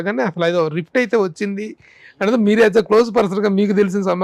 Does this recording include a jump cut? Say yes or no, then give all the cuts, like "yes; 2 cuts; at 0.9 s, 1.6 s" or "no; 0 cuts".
no; 0 cuts